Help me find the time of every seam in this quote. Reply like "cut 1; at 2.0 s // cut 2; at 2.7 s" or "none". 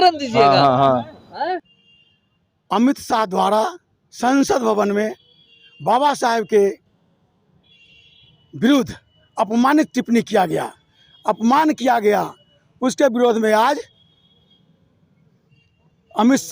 cut 1; at 1.7 s

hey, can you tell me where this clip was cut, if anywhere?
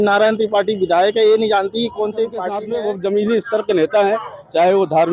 cut 1; at 2.6 s

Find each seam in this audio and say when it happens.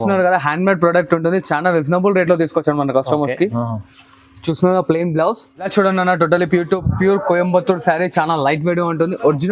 cut 1; at 5.5 s

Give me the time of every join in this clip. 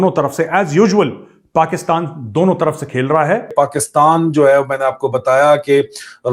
cut 1; at 3.5 s

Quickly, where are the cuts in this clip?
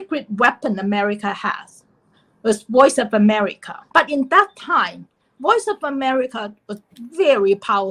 cut 1; at 3.8 s

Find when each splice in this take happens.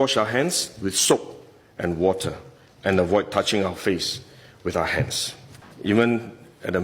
cut 1; at 5.7 s

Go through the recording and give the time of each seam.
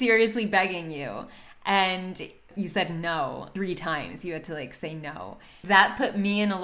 cut 1; at 2.5 s // cut 2; at 3.5 s // cut 3; at 5.5 s

